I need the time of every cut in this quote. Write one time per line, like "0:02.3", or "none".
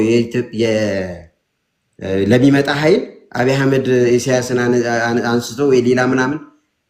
none